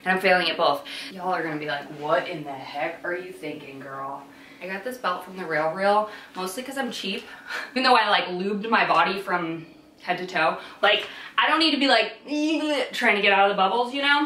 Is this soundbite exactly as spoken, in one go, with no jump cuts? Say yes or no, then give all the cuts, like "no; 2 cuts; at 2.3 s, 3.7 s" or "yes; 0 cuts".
no; 4 cuts; at 1.0 s, 4.4 s, 7.6 s, 10.8 s